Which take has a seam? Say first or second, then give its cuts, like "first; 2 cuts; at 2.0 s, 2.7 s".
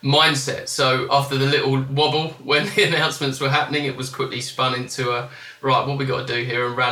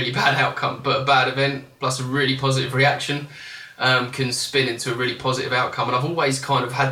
first; 1 cut; at 1.0 s